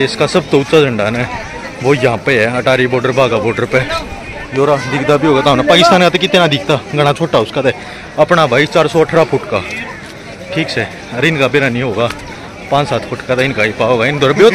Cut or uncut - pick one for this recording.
uncut